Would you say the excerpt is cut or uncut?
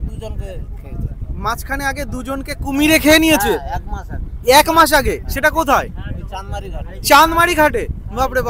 uncut